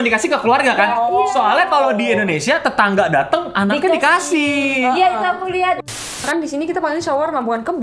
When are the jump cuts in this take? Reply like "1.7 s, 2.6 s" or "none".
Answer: 5.9 s